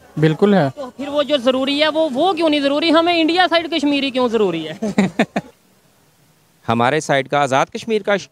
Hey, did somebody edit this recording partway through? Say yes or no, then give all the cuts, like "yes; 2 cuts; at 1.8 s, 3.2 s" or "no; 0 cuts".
yes; 1 cut; at 5.5 s